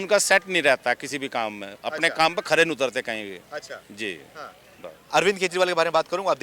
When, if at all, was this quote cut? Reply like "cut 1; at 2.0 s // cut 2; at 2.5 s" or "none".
none